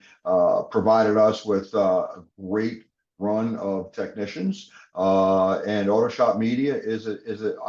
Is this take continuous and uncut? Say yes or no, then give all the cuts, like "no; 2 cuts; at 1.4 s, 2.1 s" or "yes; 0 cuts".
yes; 0 cuts